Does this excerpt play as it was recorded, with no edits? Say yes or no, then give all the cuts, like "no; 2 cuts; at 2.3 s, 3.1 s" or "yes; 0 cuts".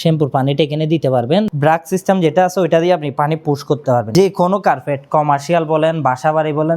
no; 2 cuts; at 1.5 s, 4.1 s